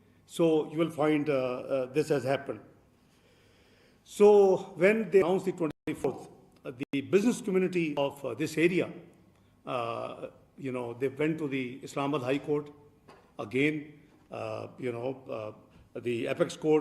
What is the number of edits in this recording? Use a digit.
1